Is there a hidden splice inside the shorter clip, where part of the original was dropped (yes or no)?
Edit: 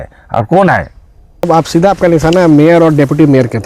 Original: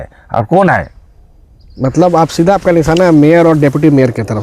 yes